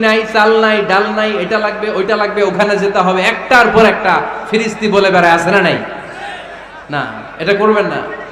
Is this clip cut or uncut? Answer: uncut